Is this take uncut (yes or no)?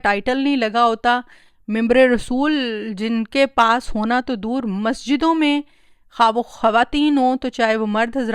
yes